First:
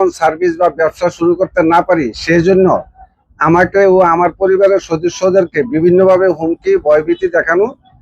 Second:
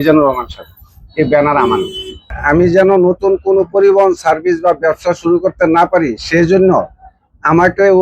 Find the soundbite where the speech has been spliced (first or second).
second